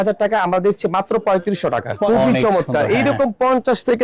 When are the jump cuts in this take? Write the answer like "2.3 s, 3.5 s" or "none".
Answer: 2.1 s